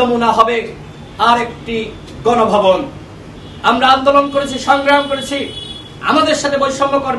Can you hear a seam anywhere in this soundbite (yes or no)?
no